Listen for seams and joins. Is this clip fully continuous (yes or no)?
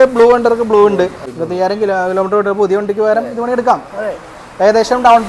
no